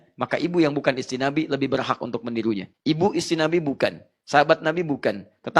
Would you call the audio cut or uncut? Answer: cut